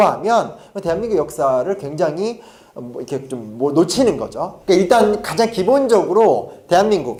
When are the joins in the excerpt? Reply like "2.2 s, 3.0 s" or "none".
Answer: none